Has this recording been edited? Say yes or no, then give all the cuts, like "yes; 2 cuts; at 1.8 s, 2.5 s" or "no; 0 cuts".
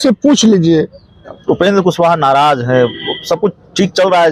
yes; 1 cut; at 1.4 s